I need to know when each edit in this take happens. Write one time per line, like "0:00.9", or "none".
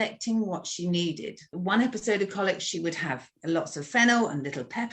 0:01.6
0:03.3